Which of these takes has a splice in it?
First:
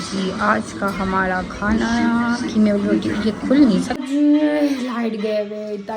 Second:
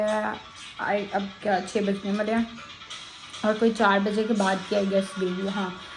first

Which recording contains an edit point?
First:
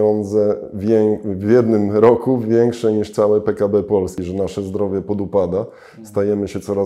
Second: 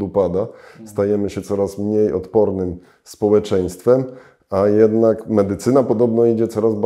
first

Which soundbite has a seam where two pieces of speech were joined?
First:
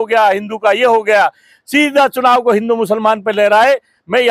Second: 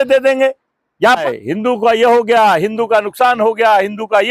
second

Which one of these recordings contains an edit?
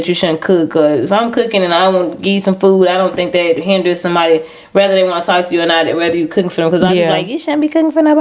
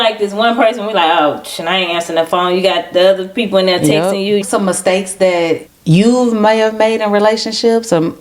second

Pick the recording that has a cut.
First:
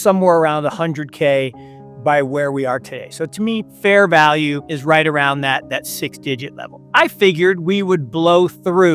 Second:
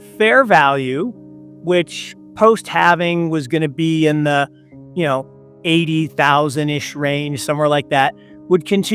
first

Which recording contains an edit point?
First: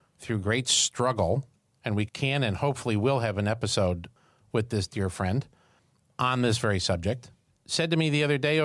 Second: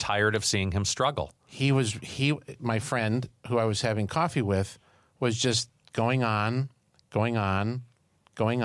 first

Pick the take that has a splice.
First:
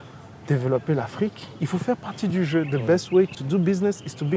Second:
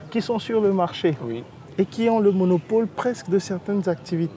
first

